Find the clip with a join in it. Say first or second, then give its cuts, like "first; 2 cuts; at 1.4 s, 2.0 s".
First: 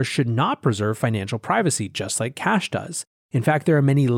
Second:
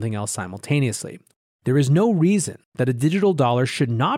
second; 1 cut; at 1.2 s